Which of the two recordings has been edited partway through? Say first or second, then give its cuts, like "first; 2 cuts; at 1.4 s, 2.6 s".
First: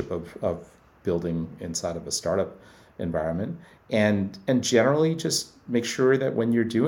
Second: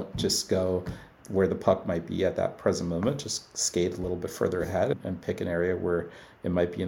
second; 2 cuts; at 1.1 s, 4.9 s